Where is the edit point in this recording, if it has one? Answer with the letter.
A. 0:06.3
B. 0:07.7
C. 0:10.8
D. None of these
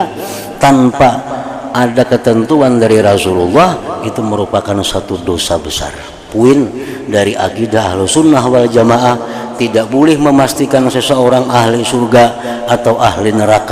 A